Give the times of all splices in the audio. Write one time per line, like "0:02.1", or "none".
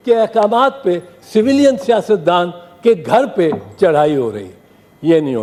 none